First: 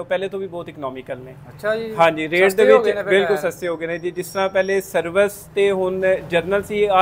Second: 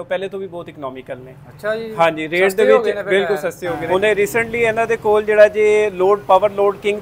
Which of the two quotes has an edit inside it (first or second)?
second